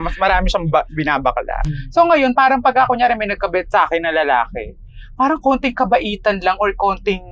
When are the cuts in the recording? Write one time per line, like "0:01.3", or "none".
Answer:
0:01.6